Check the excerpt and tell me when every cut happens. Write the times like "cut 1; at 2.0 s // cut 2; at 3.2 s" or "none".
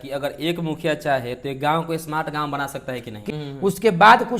cut 1; at 3.1 s